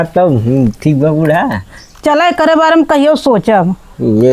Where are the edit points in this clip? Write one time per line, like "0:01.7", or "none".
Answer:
none